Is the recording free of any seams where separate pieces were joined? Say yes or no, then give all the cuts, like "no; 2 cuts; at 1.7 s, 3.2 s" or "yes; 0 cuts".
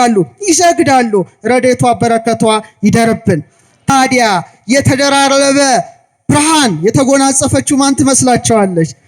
no; 1 cut; at 3.9 s